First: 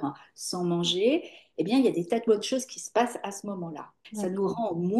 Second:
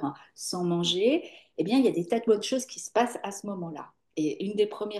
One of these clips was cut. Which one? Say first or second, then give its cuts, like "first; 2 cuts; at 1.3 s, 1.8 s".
first; 1 cut; at 4.0 s